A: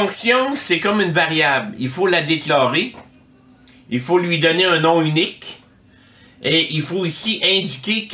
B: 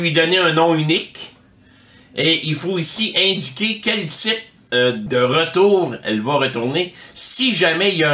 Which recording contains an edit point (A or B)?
B